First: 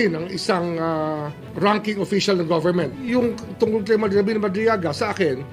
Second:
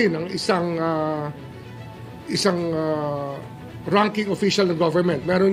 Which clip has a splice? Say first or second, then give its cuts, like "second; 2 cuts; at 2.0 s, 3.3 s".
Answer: first; 2 cuts; at 1.4 s, 2.9 s